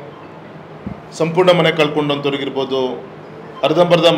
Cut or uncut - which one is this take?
uncut